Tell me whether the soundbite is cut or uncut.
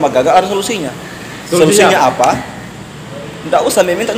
uncut